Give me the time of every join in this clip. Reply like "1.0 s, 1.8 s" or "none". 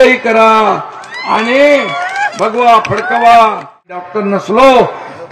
4.1 s